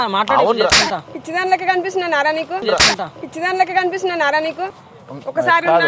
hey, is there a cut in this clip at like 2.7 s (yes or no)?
no